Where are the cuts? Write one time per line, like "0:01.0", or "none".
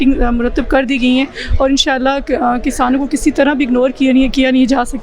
none